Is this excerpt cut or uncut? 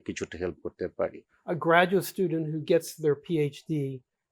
cut